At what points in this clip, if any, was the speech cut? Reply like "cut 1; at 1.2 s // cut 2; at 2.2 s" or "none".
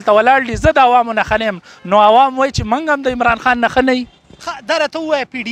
none